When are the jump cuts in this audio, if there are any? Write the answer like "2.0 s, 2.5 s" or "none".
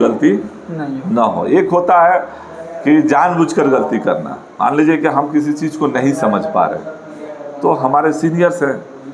none